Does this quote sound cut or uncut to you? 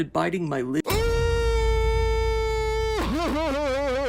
uncut